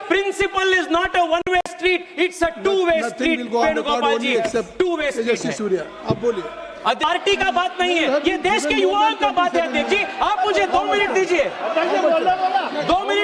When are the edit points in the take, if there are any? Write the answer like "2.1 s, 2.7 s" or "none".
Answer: 7.0 s